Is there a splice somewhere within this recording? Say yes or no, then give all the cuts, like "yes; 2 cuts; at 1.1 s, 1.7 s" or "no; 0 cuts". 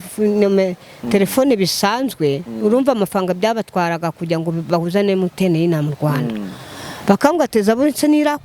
no; 0 cuts